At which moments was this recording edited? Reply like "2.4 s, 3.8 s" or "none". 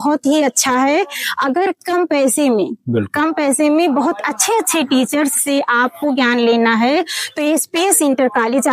none